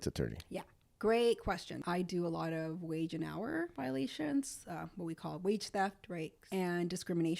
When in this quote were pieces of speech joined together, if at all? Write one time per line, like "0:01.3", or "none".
0:01.8
0:06.4

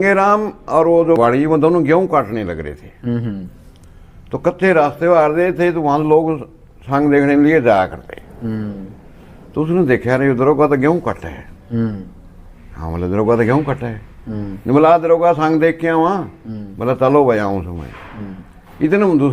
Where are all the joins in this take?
0:01.2

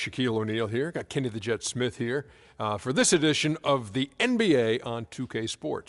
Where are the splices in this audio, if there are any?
none

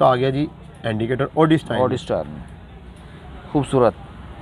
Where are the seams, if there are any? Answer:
none

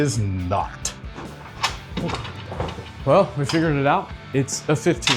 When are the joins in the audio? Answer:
0:01.0

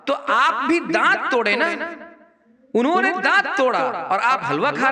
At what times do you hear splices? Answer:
0:01.0

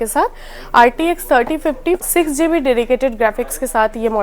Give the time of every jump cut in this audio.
0:02.0

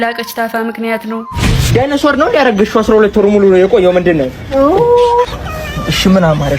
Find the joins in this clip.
0:01.6

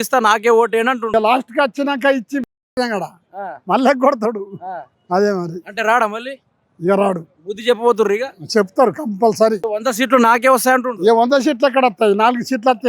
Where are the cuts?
0:01.1
0:09.6

